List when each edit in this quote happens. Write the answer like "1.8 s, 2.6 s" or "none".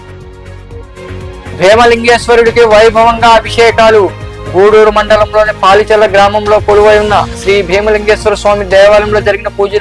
1.5 s